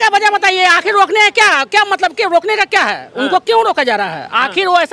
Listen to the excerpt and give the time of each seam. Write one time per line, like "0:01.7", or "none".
none